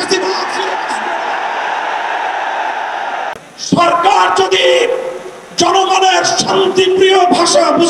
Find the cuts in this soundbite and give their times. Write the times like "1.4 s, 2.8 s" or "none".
3.3 s